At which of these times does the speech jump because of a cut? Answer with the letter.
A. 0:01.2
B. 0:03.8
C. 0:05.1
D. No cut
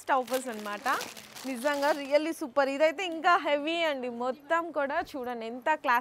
D